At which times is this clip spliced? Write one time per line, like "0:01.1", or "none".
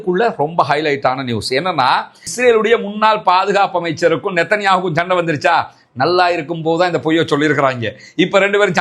0:02.2